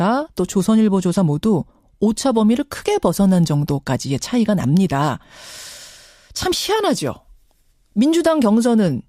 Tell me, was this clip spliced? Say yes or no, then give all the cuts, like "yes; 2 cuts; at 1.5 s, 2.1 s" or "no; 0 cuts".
no; 0 cuts